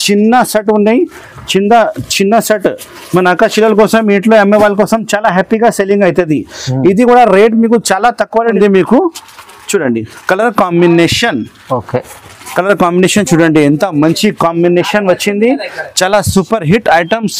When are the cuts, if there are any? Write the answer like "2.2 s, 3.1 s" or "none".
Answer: 8.6 s

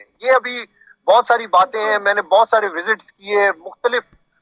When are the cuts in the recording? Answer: none

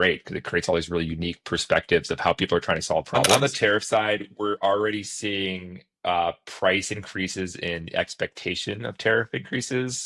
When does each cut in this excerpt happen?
3.3 s

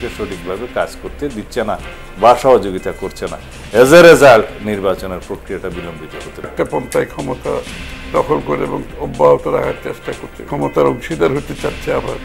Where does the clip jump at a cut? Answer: 6.5 s, 10.4 s

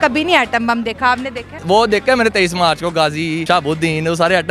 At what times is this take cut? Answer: 1.6 s

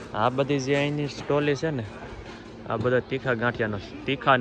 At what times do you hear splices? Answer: none

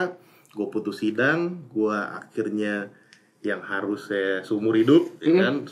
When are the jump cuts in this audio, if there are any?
none

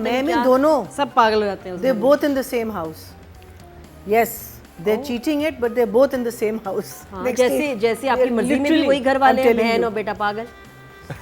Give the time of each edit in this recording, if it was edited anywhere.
none

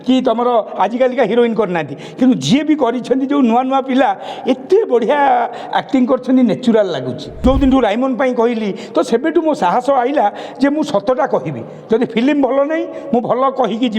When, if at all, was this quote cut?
7.2 s

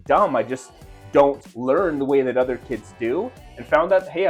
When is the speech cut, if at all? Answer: none

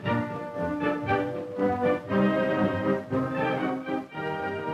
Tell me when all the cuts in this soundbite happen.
1.3 s

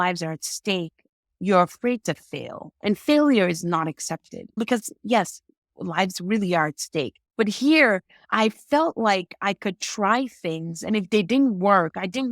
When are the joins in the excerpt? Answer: 4.6 s, 7.2 s, 8.2 s

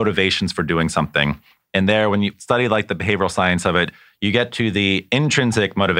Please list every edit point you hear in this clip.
none

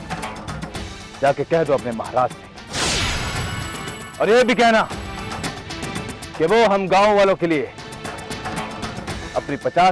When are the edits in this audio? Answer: none

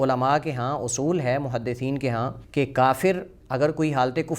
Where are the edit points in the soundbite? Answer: 2.4 s

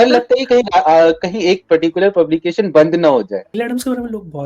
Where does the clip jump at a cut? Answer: 3.6 s

